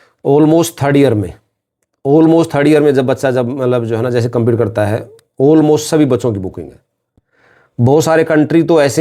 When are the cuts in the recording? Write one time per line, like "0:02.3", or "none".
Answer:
none